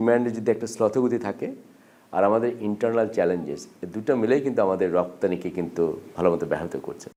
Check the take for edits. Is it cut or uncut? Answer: uncut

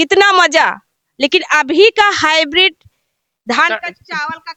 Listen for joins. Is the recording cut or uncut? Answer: uncut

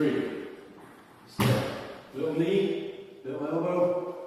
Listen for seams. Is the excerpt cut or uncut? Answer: uncut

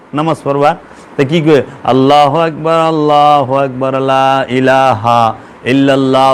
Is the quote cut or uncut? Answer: uncut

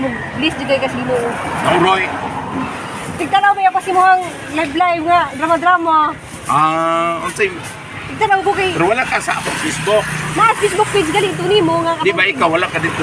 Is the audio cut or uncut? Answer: uncut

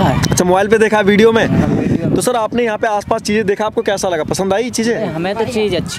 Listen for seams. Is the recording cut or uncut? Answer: uncut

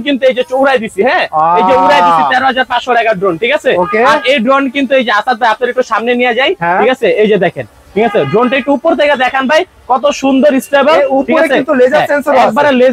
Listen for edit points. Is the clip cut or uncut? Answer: uncut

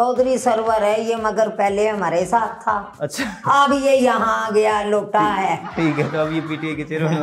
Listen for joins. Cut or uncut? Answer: uncut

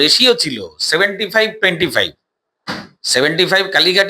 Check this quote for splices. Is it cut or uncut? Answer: uncut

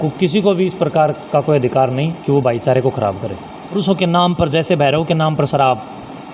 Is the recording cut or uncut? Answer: cut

